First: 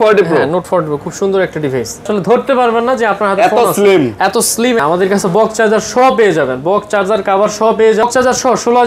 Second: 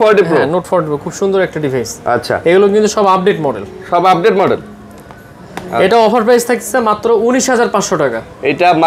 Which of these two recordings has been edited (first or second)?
first